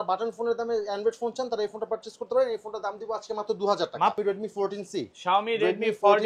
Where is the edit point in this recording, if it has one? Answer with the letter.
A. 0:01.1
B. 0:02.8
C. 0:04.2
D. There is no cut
C